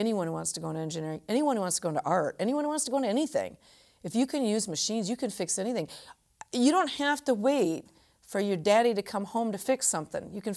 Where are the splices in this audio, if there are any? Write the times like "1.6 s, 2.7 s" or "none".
none